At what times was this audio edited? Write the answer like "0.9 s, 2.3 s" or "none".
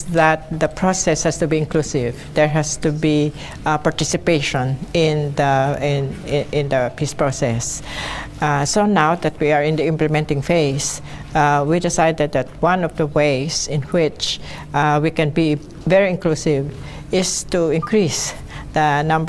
none